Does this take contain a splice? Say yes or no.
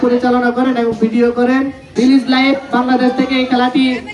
yes